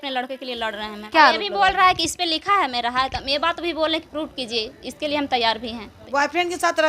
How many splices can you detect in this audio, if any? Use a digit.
2